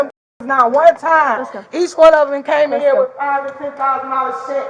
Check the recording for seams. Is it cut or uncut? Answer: uncut